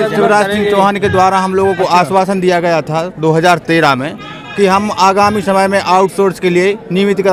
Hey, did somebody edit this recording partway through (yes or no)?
no